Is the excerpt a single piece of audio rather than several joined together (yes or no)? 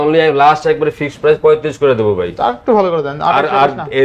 yes